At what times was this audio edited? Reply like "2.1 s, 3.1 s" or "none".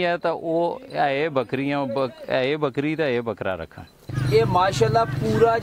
4.1 s